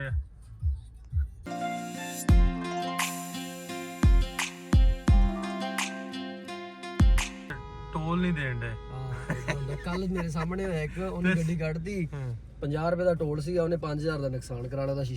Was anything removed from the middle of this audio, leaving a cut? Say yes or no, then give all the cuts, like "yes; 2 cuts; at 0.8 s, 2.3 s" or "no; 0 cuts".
yes; 2 cuts; at 1.5 s, 7.4 s